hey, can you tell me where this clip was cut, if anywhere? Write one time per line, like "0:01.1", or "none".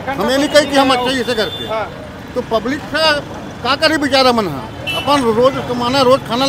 none